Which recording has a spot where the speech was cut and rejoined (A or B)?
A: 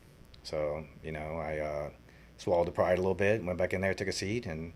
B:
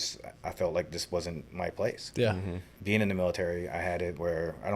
B